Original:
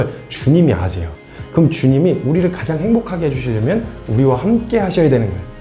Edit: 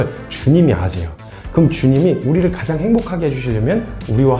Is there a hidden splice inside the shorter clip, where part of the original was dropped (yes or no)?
no